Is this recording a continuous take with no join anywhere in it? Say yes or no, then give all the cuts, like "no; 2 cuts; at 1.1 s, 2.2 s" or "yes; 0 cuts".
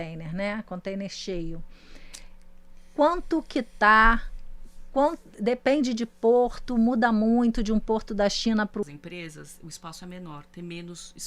no; 1 cut; at 8.8 s